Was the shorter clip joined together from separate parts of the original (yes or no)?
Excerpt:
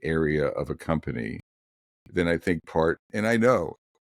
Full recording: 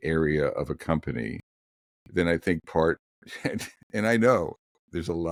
yes